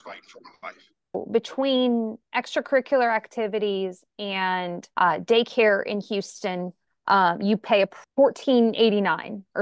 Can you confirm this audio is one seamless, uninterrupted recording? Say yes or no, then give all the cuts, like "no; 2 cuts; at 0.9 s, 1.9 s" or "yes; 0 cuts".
no; 3 cuts; at 1.2 s, 4.8 s, 8.0 s